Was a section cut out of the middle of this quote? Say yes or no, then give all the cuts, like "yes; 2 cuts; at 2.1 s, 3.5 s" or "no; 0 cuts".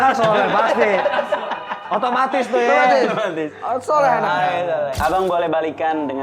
yes; 1 cut; at 5.0 s